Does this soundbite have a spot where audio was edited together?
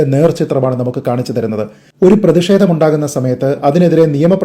yes; 1 cut; at 1.8 s

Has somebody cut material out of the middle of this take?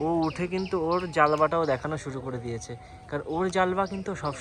no; 0 cuts

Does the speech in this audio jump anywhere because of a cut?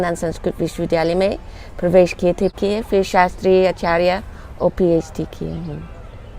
yes; 1 cut; at 2.5 s

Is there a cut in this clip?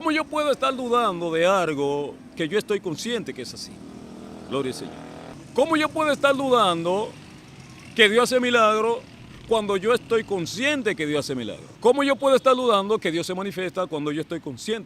yes; 2 cuts; at 5.4 s, 11.6 s

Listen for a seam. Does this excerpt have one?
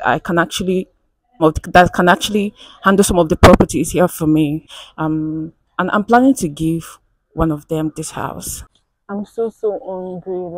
yes; 3 cuts; at 1.4 s, 4.7 s, 8.8 s

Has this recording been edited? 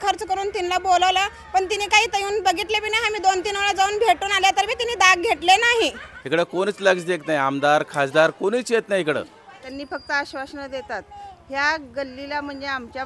yes; 2 cuts; at 6.1 s, 9.6 s

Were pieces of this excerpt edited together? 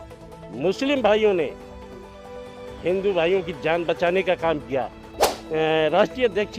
yes; 1 cut; at 5.2 s

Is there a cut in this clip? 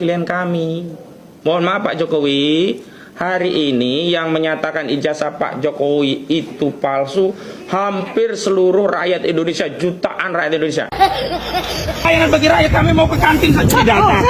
yes; 1 cut; at 12.1 s

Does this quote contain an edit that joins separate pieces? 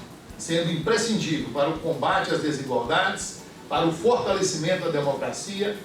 no; 0 cuts

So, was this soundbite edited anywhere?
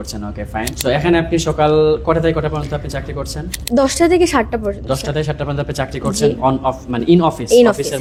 no; 0 cuts

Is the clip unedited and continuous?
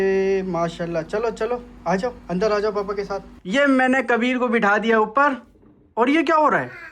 no; 1 cut; at 3.3 s

